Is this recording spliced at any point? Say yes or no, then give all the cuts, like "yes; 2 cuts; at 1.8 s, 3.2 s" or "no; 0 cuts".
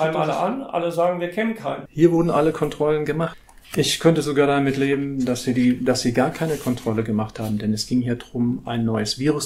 yes; 2 cuts; at 1.8 s, 3.3 s